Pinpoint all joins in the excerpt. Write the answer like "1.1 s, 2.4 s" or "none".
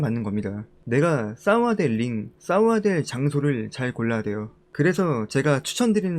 4.6 s